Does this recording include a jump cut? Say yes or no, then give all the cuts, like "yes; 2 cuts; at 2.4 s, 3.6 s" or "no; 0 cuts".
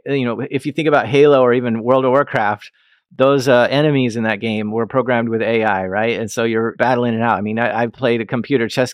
yes; 1 cut; at 7.9 s